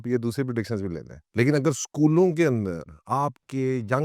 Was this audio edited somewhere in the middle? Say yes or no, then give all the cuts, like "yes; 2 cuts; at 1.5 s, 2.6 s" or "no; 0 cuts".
yes; 1 cut; at 1.2 s